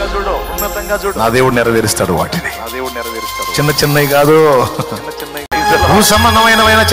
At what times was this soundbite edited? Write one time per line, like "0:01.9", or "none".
0:05.5